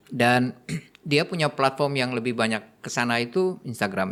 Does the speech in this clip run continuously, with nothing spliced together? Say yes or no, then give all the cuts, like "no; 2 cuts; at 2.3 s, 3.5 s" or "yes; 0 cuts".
yes; 0 cuts